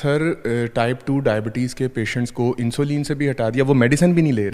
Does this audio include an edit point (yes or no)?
no